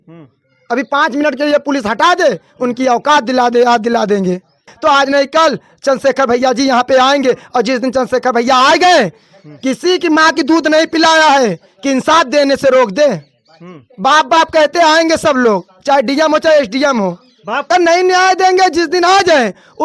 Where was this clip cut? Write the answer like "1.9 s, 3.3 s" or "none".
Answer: 4.7 s, 17.7 s